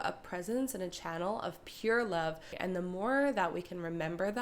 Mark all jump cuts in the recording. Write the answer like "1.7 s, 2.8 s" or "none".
2.5 s